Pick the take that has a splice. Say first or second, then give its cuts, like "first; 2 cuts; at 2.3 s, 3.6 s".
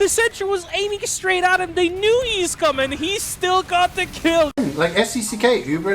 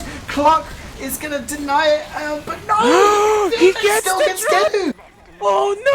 first; 1 cut; at 4.6 s